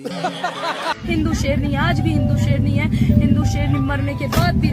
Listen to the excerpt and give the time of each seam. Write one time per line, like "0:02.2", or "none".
0:00.9

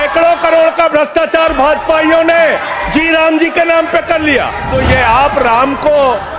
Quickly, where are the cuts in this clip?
0:04.7

